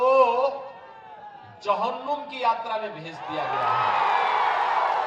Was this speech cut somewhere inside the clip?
no; 0 cuts

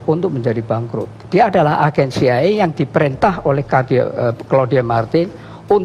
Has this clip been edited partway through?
yes; 1 cut; at 1.1 s

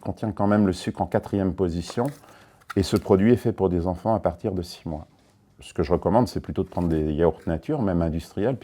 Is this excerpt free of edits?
yes; 0 cuts

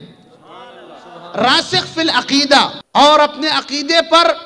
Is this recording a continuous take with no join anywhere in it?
no; 1 cut; at 2.8 s

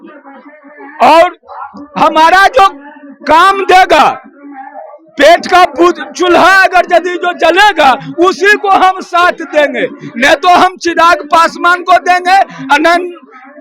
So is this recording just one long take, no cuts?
yes; 0 cuts

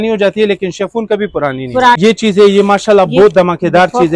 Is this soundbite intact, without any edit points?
no; 1 cut; at 2.0 s

